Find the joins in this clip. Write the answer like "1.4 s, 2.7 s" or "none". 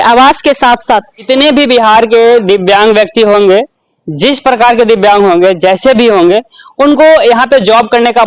1.2 s